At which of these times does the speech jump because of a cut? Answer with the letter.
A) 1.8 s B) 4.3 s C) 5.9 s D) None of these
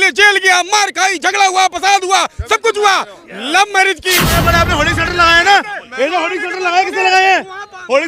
B